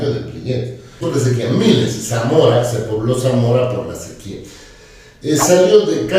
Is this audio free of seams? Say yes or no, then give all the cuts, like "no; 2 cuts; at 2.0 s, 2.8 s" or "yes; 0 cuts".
no; 1 cut; at 1.0 s